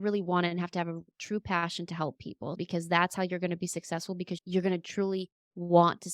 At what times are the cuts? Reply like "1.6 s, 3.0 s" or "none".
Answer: 2.6 s, 4.3 s

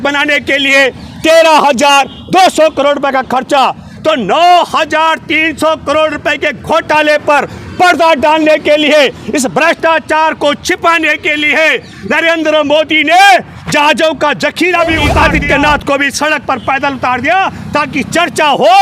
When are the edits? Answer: 15.1 s

